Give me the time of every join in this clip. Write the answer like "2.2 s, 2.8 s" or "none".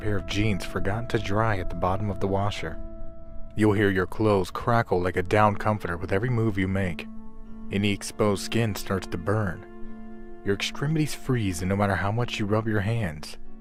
none